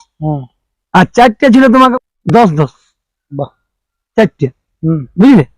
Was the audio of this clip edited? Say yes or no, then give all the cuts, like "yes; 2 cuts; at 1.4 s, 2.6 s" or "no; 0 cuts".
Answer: yes; 1 cut; at 1.9 s